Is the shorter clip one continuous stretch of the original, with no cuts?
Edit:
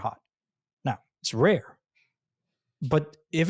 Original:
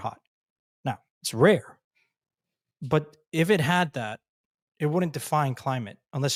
yes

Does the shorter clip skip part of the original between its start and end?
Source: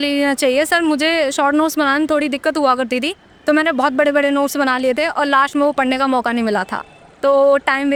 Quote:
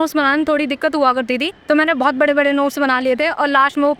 yes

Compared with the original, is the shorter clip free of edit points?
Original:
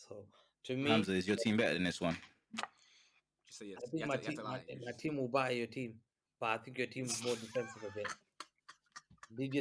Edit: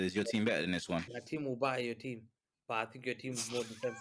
no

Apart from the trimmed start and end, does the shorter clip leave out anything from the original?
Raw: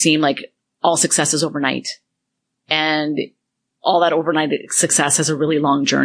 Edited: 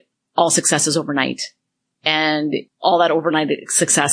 yes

